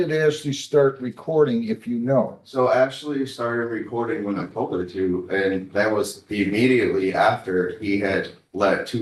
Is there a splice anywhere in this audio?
no; 0 cuts

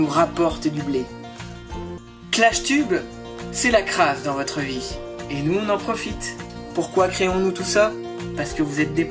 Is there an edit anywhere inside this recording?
no; 0 cuts

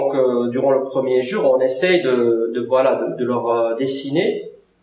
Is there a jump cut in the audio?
no; 0 cuts

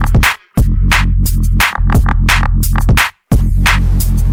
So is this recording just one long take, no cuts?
yes; 0 cuts

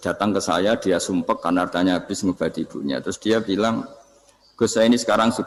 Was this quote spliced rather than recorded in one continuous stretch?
no; 0 cuts

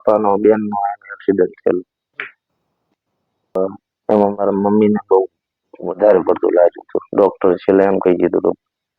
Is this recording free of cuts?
no; 1 cut; at 3.6 s

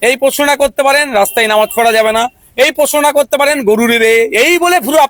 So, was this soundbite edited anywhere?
no; 0 cuts

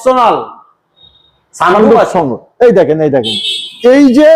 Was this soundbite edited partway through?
no; 0 cuts

